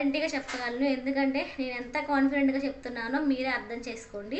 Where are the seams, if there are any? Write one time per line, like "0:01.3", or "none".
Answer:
none